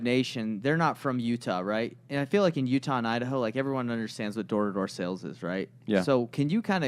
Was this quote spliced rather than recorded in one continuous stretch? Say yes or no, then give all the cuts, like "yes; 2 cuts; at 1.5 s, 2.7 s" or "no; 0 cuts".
no; 0 cuts